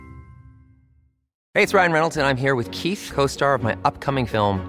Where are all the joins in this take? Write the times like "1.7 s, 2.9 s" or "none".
1.4 s